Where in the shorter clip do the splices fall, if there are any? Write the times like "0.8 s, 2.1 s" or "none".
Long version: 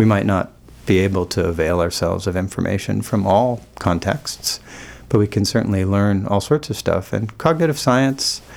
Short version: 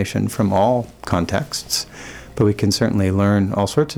none